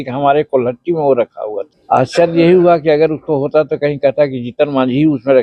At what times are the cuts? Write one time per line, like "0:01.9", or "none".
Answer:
0:01.7